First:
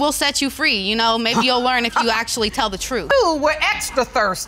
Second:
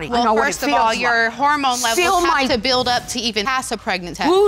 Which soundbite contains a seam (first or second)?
first